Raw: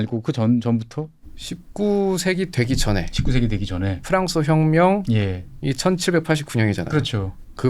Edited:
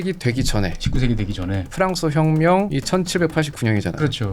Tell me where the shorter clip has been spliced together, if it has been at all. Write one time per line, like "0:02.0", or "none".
0:02.7